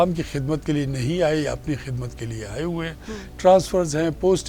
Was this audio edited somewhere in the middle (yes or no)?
no